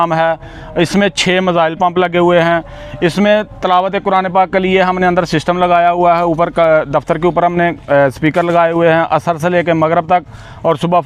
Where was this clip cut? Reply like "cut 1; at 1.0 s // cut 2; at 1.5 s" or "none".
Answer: none